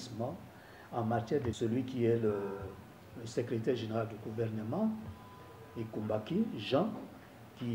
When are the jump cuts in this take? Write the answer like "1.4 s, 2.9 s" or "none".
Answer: 1.6 s